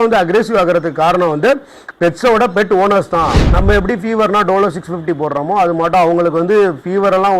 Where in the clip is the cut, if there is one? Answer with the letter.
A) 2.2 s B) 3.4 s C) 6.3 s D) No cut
B